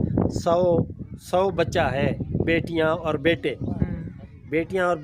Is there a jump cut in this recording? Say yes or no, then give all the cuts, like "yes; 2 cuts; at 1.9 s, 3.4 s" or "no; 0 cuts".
no; 0 cuts